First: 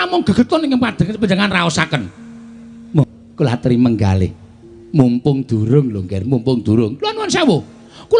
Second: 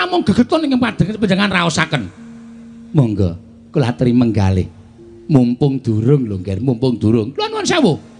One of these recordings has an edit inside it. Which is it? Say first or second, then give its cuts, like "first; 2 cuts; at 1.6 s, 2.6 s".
first; 1 cut; at 3.0 s